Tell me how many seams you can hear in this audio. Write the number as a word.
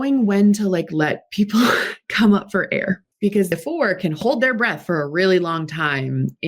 one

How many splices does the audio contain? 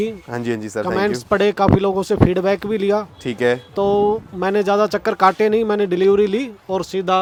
zero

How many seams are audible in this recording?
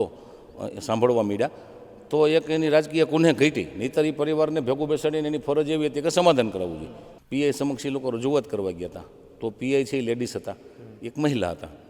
one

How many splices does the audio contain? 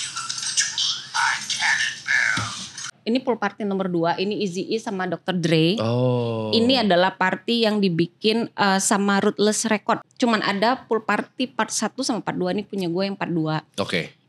two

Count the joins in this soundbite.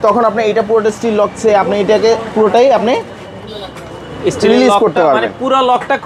zero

